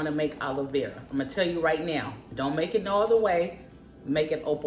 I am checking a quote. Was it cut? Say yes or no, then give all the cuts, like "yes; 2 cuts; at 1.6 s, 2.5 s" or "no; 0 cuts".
no; 0 cuts